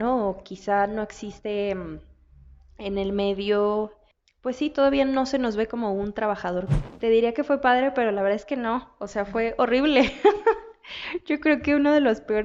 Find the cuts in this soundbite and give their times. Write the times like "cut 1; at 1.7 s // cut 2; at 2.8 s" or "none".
cut 1; at 6.8 s